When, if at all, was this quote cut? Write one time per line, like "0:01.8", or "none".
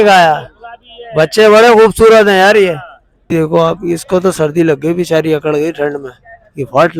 0:03.3